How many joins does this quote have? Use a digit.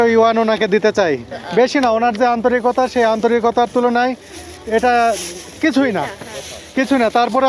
1